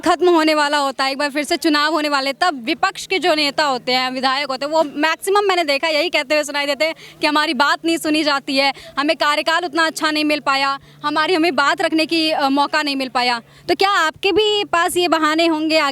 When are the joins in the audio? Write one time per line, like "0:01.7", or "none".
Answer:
none